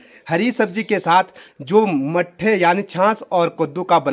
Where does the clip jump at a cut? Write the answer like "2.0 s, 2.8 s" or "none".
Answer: none